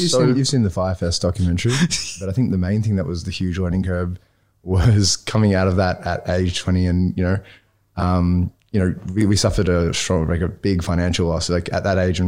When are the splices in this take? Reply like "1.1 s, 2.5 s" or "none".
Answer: 2.3 s